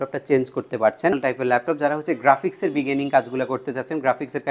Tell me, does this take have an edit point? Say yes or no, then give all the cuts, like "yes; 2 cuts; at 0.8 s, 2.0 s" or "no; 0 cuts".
yes; 1 cut; at 1.2 s